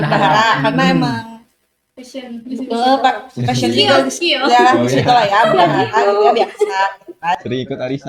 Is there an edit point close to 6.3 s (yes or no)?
no